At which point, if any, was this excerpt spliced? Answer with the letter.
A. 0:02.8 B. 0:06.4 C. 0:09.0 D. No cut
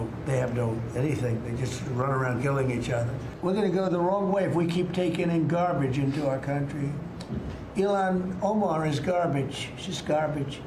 D